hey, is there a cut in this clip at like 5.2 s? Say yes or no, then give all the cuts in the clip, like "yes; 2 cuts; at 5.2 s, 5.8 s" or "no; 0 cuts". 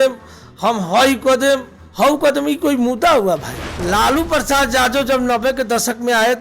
no; 1 cut; at 3.5 s